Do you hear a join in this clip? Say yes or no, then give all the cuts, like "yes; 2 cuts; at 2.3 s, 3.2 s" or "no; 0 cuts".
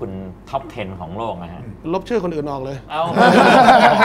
no; 0 cuts